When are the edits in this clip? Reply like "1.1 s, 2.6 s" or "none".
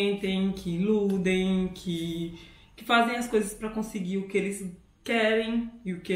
none